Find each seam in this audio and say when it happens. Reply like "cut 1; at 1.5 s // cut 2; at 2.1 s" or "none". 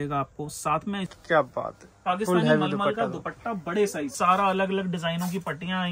cut 1; at 1.1 s // cut 2; at 4.1 s